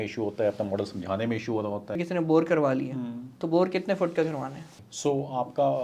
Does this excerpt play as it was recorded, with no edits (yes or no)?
no